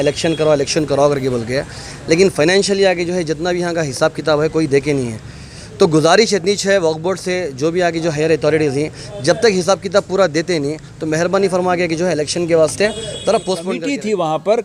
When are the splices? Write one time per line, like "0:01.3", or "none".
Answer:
0:13.7